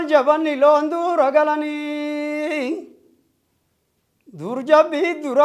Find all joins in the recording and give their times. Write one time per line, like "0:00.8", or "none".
none